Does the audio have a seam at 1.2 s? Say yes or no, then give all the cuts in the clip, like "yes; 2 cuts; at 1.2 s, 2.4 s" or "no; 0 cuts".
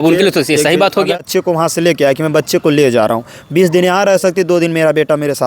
yes; 1 cut; at 1.2 s